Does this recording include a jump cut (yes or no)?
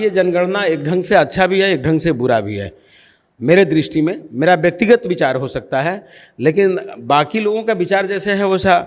no